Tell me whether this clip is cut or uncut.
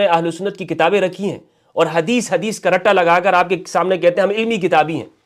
uncut